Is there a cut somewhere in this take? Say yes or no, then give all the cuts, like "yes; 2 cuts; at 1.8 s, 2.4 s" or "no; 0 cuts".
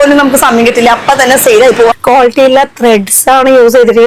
yes; 1 cut; at 2.0 s